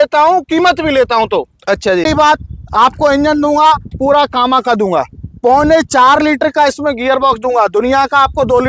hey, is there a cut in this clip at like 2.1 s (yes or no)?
yes